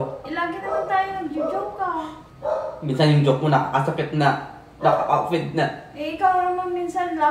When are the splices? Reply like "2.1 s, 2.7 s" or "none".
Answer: none